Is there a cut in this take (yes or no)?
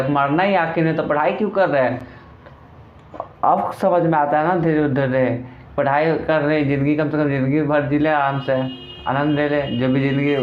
no